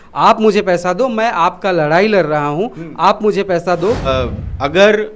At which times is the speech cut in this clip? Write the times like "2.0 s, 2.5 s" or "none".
4.0 s